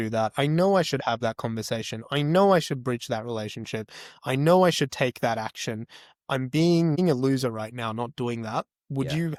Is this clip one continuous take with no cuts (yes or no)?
yes